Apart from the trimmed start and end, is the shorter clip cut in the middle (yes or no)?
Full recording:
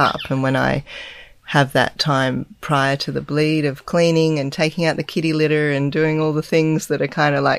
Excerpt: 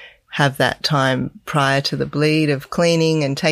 no